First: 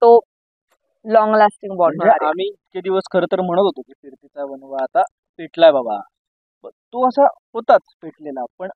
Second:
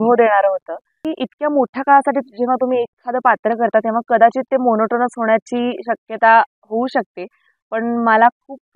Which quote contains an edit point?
second; 1 cut; at 1.0 s

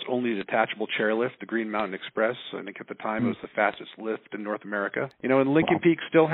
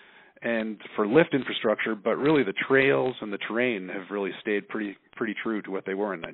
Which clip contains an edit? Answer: first; 1 cut; at 5.1 s

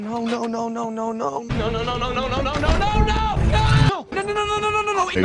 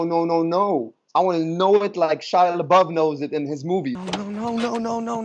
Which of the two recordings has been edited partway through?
first; 1 cut; at 3.9 s

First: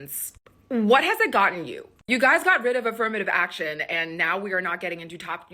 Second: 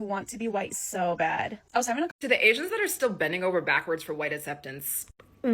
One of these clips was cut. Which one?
second; 1 cut; at 2.1 s

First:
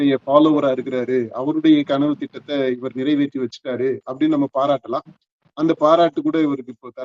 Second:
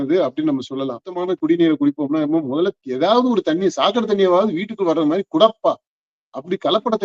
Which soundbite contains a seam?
second; 1 cut; at 1.1 s

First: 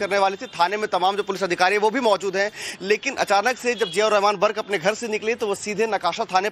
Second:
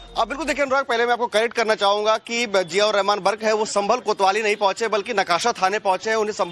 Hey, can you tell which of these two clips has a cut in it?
first; 1 cut; at 4.1 s

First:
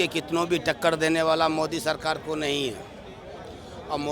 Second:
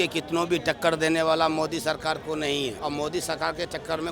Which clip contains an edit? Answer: second; 1 cut; at 2.8 s

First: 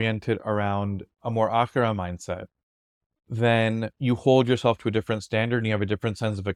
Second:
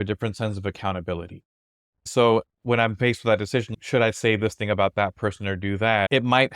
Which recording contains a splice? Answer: second; 2 cuts; at 2.1 s, 3.7 s

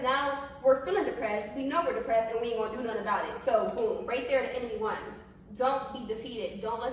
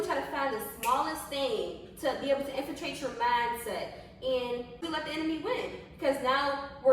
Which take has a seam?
second; 1 cut; at 4.8 s

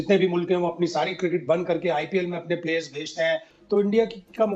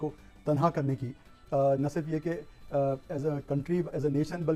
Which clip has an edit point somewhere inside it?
first; 1 cut; at 3.5 s

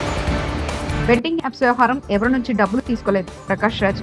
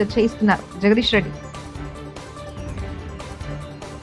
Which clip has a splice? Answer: first; 1 cut; at 1.0 s

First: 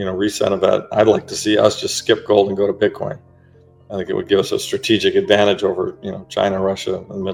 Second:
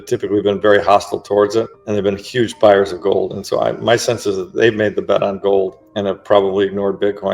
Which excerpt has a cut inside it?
second; 2 cuts; at 1.8 s, 5.8 s

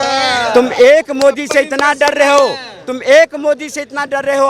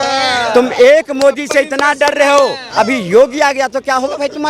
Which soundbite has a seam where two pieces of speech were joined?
second; 1 cut; at 2.6 s

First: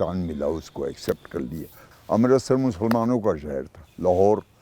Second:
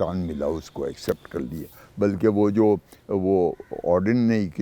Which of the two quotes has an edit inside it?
first; 1 cut; at 1.9 s

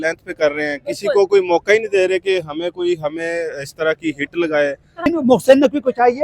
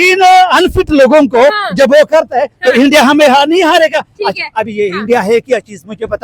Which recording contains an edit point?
first; 1 cut; at 5.1 s

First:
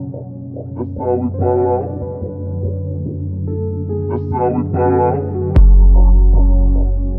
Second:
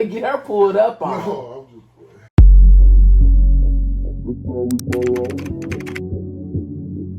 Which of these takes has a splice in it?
second; 1 cut; at 2.2 s

